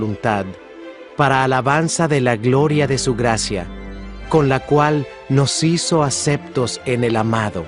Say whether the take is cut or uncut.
cut